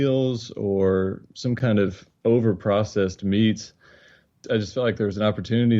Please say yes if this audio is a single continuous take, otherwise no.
no